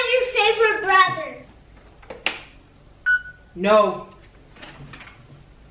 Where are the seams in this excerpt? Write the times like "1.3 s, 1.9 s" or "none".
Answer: 1.5 s